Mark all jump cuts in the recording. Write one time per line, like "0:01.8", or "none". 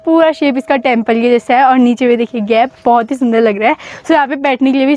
none